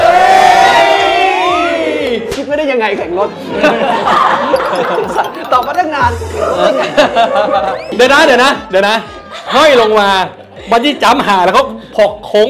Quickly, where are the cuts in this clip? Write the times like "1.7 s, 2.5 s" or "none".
7.8 s